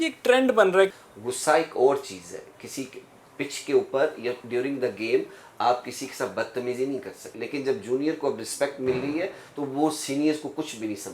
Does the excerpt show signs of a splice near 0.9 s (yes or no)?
yes